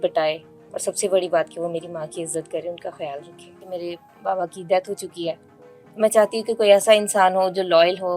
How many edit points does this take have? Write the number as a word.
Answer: one